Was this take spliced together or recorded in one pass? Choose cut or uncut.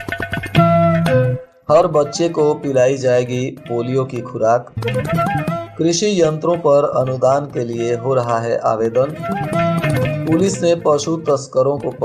cut